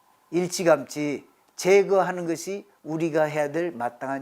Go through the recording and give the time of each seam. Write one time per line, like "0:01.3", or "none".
none